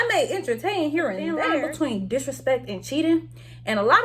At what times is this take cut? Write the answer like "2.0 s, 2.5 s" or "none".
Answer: 1.4 s